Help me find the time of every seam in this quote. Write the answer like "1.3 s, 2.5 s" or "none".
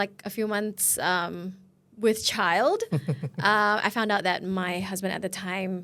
none

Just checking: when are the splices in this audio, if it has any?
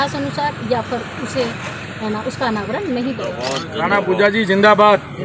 3.6 s

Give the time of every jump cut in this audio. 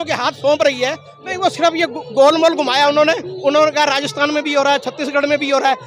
1.1 s

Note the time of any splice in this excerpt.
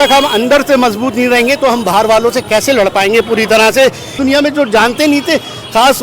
4.2 s

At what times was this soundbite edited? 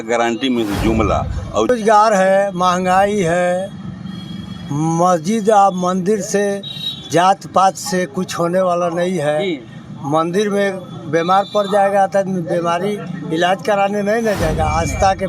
1.7 s

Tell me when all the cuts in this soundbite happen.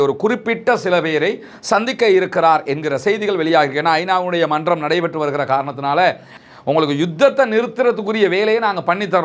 6.3 s

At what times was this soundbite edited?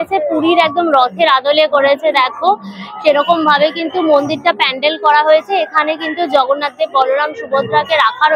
none

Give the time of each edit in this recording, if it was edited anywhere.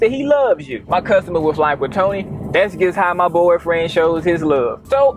none

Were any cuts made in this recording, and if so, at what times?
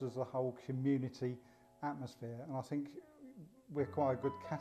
none

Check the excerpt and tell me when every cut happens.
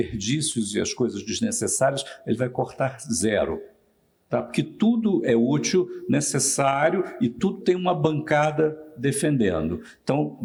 none

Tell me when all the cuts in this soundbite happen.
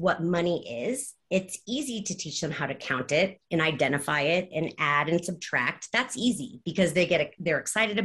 none

